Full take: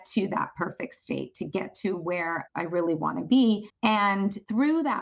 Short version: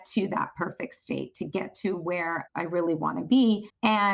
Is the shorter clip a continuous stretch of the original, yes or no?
yes